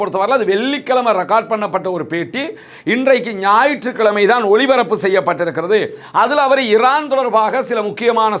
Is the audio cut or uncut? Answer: uncut